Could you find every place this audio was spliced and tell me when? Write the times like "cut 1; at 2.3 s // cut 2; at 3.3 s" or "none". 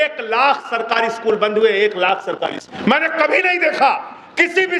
cut 1; at 2.7 s